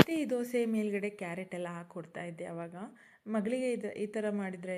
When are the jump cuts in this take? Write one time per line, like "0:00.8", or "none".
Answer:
none